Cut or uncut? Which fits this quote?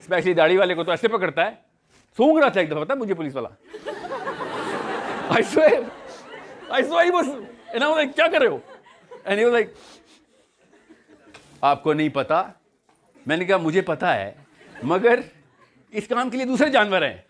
uncut